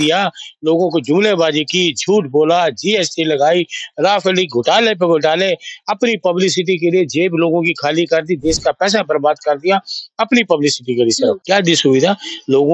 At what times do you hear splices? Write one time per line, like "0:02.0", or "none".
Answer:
0:11.4

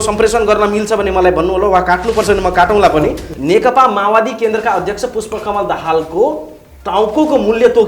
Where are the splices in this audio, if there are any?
0:03.3

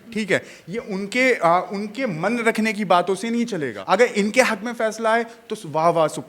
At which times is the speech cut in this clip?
0:03.7

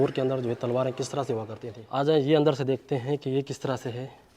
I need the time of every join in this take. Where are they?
0:01.9

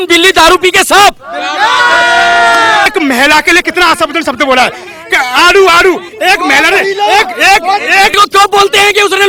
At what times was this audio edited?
0:02.9
0:08.1

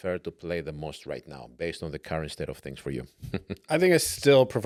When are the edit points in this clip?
none

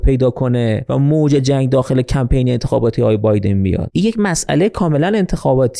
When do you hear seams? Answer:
0:00.8
0:03.9

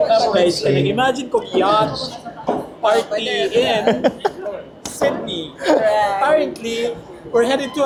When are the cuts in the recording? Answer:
none

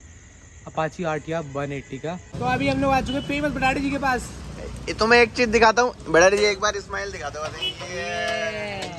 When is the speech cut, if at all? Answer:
0:02.3

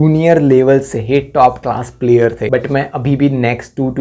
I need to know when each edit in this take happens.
0:02.4

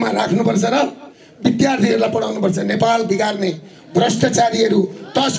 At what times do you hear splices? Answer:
none

